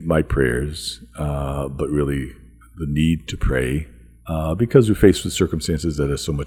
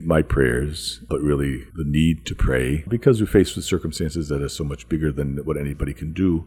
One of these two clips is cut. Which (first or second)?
second